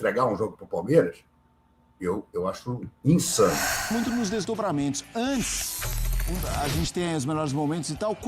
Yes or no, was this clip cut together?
yes